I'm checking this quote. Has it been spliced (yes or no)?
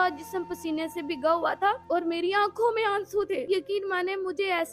yes